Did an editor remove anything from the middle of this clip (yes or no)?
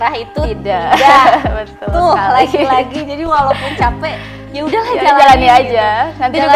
no